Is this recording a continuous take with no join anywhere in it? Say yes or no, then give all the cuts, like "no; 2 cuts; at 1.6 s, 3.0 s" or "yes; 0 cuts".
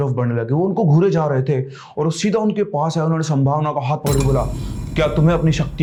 yes; 0 cuts